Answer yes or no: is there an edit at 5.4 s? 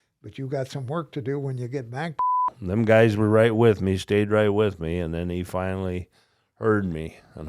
no